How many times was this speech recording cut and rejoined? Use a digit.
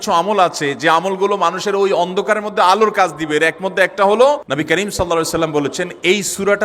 1